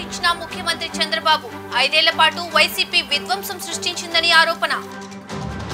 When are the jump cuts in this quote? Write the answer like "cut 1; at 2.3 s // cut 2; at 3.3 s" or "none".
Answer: none